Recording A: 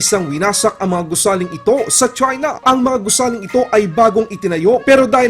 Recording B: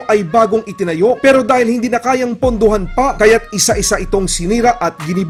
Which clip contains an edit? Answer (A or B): A